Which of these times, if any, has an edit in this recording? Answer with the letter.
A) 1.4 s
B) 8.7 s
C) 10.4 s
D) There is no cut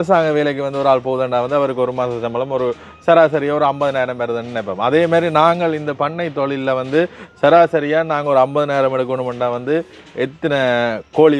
D